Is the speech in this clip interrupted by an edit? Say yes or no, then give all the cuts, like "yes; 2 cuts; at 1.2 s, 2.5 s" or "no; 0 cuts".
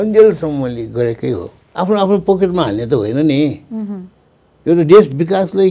yes; 1 cut; at 1.6 s